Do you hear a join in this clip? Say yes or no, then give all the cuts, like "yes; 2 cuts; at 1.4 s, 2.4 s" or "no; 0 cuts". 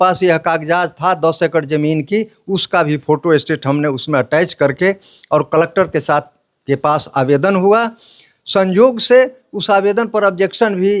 no; 0 cuts